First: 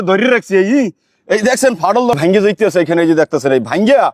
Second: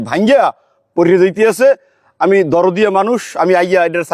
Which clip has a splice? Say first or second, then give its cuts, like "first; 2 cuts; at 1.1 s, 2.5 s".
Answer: first; 1 cut; at 2.2 s